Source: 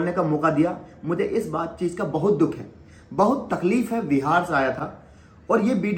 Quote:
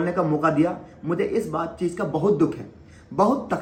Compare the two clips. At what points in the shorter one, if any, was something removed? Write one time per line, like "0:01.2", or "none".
none